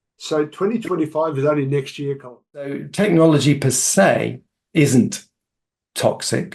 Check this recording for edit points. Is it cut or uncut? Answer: cut